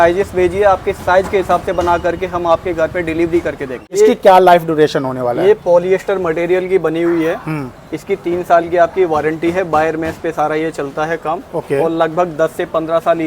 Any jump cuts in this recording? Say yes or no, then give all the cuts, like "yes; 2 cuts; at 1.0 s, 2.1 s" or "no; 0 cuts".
yes; 1 cut; at 4.0 s